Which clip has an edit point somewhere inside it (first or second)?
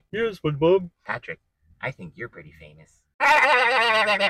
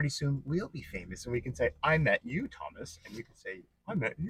first